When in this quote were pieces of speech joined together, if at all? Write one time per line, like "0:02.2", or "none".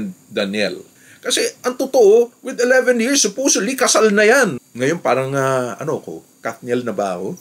0:00.9
0:04.5